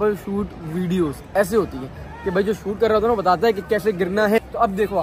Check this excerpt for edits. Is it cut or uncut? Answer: uncut